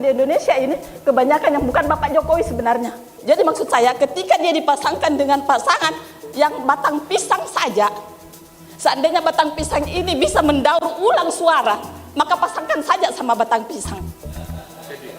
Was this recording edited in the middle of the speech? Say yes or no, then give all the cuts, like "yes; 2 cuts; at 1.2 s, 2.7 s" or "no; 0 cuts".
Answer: yes; 1 cut; at 3.1 s